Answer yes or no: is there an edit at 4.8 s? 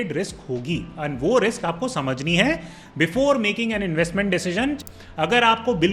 yes